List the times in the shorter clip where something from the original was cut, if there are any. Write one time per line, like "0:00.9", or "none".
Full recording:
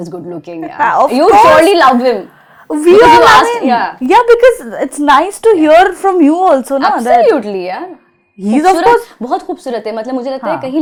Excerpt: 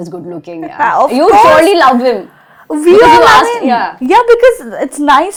none